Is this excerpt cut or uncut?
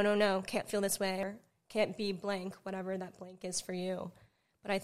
cut